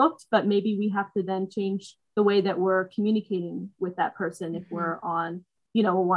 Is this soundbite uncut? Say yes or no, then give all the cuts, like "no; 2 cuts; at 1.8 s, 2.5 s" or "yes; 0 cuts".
yes; 0 cuts